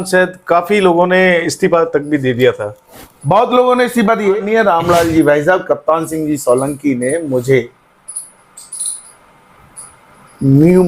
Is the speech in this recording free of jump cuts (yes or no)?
no